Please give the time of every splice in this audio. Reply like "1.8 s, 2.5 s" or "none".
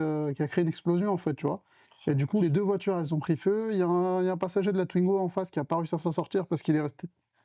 none